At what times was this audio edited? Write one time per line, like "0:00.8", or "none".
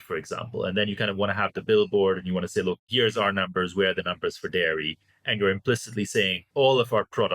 0:02.9
0:06.4